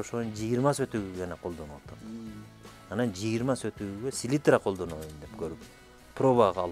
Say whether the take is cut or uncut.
uncut